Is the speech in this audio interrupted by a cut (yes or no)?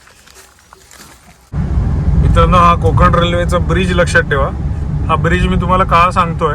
yes